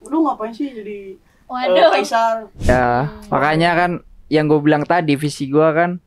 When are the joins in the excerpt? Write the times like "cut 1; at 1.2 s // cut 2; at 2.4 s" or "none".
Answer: cut 1; at 2.7 s